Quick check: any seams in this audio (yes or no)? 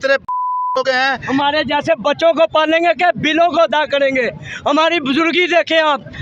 yes